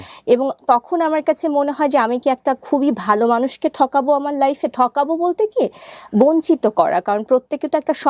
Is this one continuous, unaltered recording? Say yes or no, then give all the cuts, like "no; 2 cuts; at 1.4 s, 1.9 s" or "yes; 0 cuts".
yes; 0 cuts